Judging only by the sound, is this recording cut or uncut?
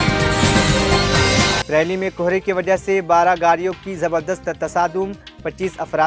cut